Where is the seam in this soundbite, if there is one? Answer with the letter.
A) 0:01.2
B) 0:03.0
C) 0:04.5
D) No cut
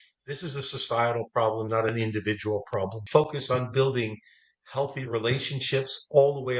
B